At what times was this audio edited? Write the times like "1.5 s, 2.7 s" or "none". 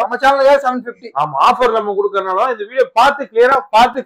none